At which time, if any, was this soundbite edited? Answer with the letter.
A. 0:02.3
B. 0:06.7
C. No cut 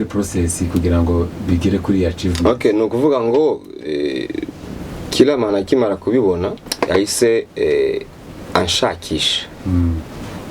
B